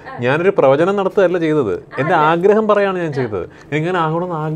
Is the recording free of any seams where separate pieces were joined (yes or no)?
yes